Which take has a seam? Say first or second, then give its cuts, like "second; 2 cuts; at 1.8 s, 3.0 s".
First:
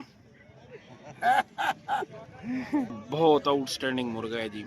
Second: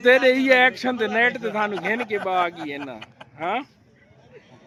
first; 1 cut; at 3.0 s